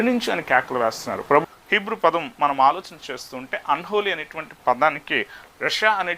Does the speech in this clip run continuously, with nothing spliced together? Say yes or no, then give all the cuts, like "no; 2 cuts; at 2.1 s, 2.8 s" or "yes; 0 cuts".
no; 1 cut; at 1.4 s